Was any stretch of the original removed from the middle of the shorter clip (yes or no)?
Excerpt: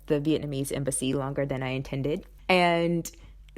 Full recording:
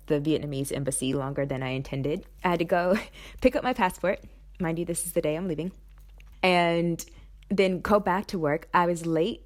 yes